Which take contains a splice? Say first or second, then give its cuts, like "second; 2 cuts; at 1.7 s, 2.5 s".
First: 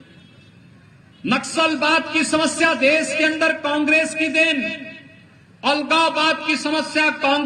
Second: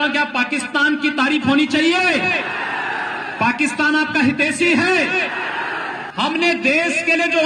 second; 1 cut; at 6.0 s